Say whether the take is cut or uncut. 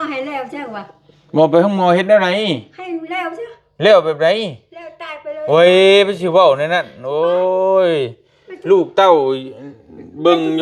uncut